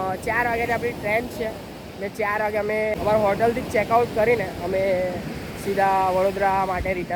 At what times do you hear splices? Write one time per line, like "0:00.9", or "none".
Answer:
none